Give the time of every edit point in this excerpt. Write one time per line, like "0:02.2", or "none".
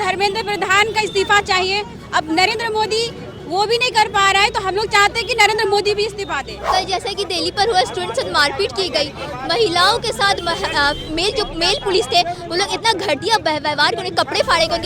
0:06.5